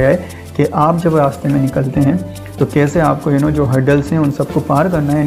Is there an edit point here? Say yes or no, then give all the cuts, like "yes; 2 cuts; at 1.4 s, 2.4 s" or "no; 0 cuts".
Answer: no; 0 cuts